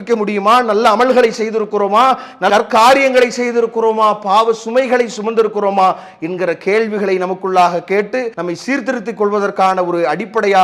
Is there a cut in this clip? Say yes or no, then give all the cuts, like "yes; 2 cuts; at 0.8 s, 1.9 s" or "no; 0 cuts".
yes; 1 cut; at 8.3 s